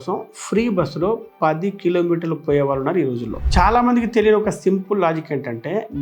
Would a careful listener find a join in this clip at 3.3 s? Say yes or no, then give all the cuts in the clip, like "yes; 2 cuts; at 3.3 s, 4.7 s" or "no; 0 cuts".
yes; 1 cut; at 3.3 s